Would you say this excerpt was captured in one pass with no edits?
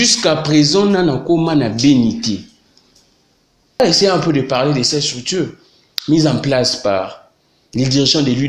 no; 1 cut; at 3.8 s

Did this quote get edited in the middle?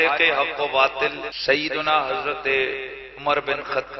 yes; 1 cut; at 1.3 s

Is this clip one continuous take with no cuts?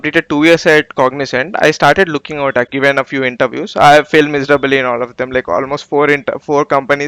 no; 1 cut; at 2.7 s

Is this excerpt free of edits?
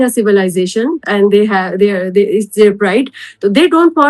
yes; 0 cuts

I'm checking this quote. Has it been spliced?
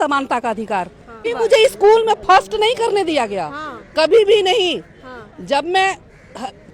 yes; 1 cut; at 1.2 s

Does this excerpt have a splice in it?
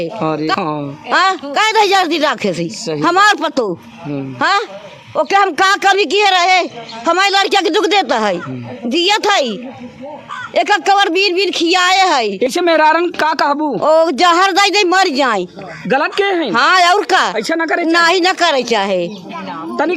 yes; 1 cut; at 12.5 s

